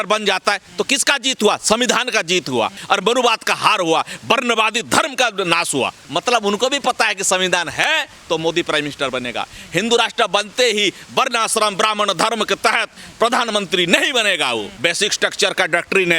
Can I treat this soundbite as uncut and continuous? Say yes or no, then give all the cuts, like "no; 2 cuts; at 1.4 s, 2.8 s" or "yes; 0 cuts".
no; 3 cuts; at 2.8 s, 6.0 s, 14.7 s